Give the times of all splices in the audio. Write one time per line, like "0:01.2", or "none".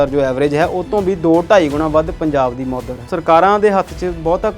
0:03.0